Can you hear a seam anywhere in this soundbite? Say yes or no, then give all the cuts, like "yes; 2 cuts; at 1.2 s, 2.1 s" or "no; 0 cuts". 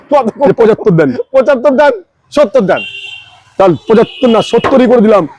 no; 0 cuts